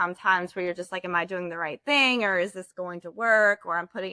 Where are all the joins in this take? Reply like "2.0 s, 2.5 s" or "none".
none